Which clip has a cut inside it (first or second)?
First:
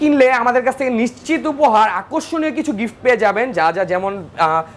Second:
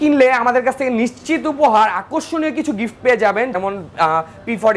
second